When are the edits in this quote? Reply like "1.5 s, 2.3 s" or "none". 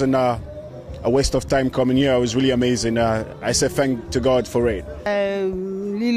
5.1 s